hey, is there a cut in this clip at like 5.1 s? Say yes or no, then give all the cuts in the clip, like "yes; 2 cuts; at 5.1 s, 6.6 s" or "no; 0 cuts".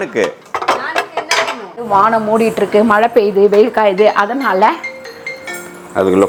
no; 0 cuts